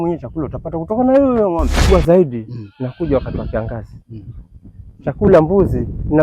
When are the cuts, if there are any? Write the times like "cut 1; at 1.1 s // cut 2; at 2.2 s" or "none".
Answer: cut 1; at 1.9 s